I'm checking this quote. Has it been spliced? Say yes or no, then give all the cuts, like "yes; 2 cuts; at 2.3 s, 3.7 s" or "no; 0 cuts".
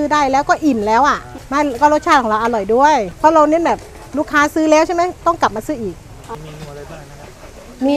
no; 0 cuts